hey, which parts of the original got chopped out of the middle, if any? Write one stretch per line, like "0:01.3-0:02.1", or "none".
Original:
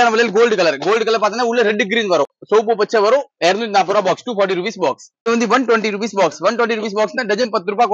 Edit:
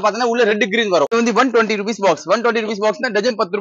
0:02.3-0:05.2